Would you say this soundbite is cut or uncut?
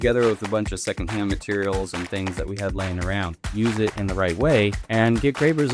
cut